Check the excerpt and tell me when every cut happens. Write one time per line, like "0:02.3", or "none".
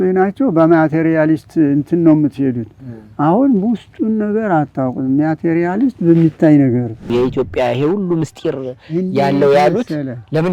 0:07.0